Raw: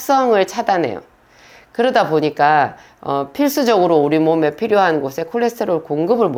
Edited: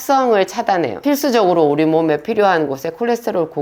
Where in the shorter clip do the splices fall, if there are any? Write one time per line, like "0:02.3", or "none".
0:01.0